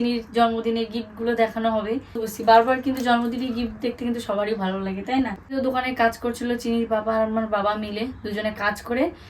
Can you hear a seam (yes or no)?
yes